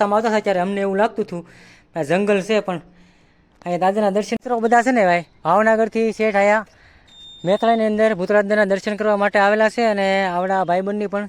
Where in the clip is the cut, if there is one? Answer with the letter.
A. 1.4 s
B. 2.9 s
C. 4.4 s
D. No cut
C